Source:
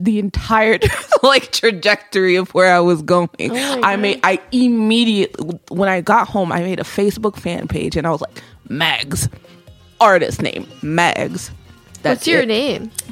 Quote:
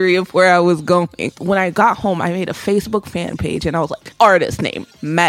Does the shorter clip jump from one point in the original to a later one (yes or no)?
yes